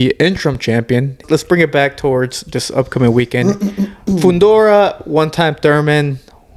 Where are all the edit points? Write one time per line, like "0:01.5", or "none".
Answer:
0:01.2